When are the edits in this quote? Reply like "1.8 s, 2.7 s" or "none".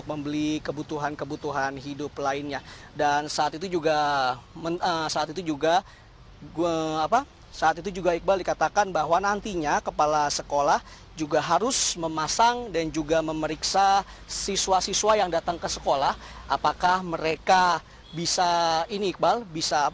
15.7 s

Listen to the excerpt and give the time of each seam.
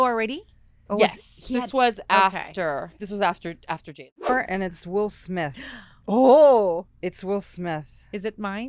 4.3 s

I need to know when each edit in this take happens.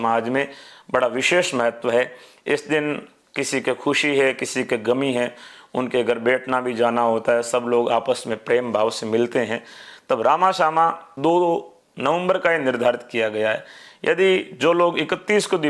11.1 s

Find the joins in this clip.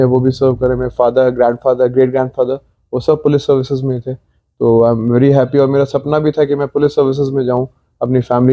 none

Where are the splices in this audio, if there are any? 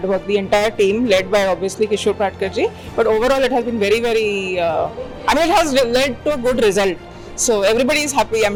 none

